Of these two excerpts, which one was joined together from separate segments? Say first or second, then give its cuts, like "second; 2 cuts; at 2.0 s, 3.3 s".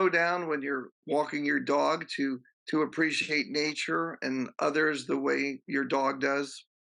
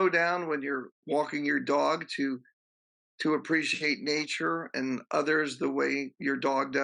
first; 1 cut; at 2.5 s